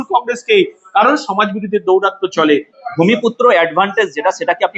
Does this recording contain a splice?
yes; 1 cut; at 2.8 s

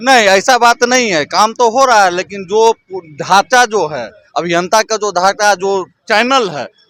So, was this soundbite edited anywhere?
no; 0 cuts

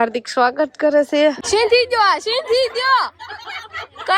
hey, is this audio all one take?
no; 1 cut; at 1.4 s

